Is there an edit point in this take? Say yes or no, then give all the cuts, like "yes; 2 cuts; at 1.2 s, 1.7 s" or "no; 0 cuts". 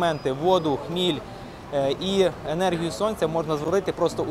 no; 0 cuts